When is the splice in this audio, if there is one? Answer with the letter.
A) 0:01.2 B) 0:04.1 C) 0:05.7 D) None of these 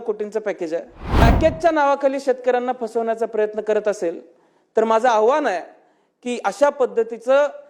A